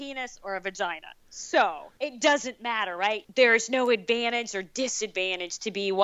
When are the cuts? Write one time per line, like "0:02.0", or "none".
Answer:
0:01.9
0:03.2